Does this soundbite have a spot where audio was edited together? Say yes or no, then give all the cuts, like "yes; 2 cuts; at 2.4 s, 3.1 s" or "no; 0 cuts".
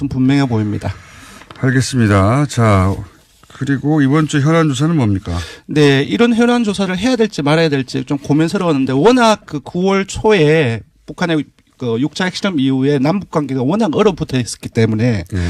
no; 0 cuts